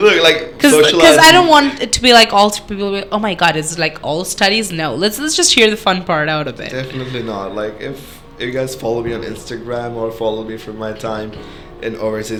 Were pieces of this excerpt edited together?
no; 0 cuts

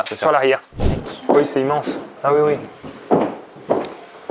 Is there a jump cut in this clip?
yes; 1 cut; at 0.9 s

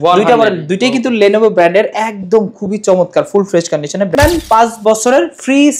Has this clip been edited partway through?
yes; 1 cut; at 4.1 s

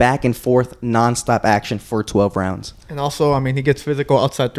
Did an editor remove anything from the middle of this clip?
no; 0 cuts

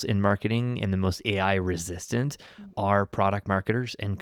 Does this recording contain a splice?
no; 0 cuts

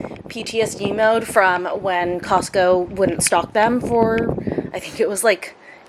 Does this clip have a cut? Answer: no; 0 cuts

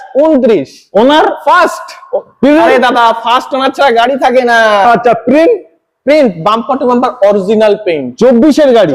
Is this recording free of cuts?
yes; 0 cuts

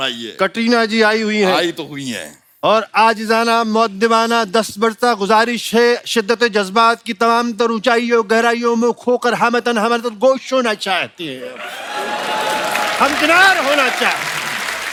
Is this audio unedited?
yes; 0 cuts

